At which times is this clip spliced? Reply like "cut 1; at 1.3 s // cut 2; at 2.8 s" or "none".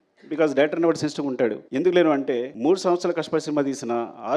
cut 1; at 1.6 s // cut 2; at 2.5 s